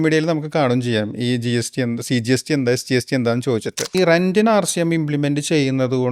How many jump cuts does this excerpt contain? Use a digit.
1